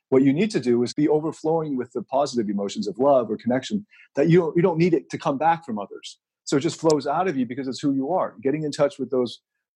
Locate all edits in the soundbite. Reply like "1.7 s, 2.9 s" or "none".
0.9 s